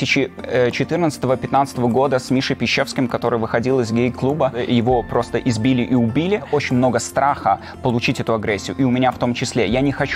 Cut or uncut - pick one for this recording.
uncut